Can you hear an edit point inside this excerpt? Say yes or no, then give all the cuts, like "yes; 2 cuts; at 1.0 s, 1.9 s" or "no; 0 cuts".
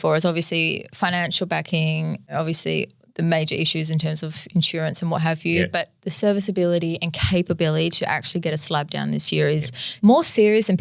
yes; 2 cuts; at 2.3 s, 9.8 s